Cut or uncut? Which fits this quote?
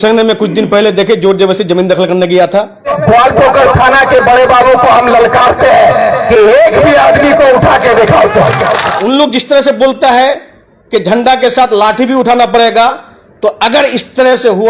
cut